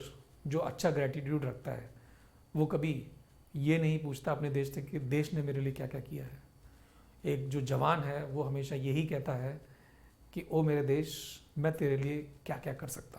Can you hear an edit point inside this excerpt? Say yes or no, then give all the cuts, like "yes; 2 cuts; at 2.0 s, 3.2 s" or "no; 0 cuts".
no; 0 cuts